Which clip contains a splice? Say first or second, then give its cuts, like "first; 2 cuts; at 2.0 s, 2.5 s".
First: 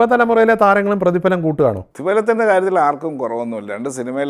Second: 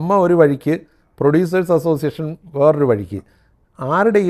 first; 1 cut; at 1.9 s